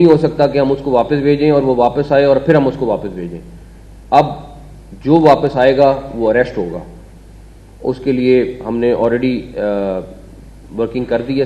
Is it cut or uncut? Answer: uncut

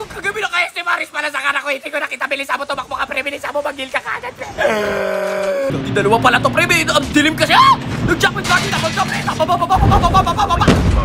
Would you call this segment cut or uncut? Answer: cut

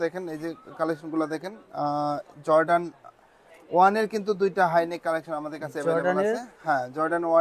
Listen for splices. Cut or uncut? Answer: uncut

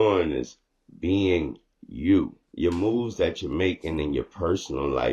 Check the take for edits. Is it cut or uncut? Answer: cut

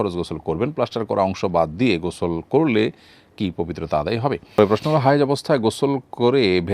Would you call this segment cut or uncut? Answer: cut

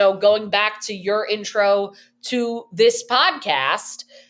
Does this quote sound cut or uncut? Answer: uncut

